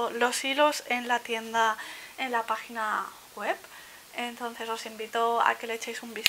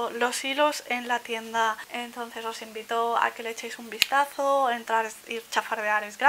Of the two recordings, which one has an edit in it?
second; 1 cut; at 1.9 s

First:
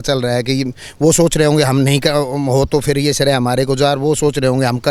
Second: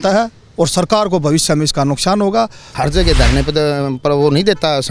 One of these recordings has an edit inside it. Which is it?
second; 1 cut; at 2.7 s

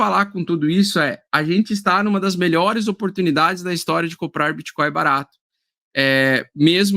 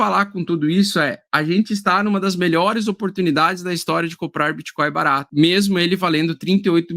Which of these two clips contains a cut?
second; 1 cut; at 5.3 s

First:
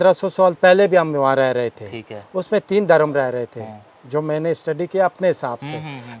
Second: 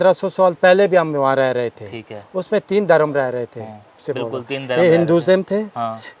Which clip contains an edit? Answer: second; 1 cut; at 4.0 s

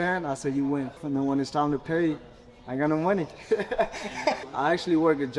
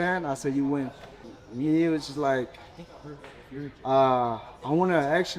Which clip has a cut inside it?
first; 2 cuts; at 1.0 s, 4.4 s

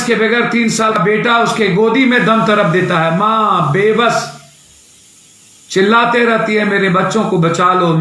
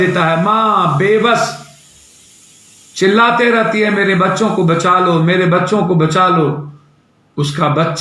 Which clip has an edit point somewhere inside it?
first; 1 cut; at 0.9 s

